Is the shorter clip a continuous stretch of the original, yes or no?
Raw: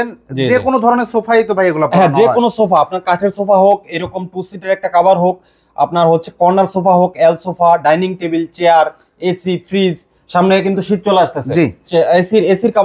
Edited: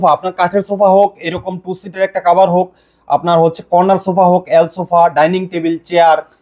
yes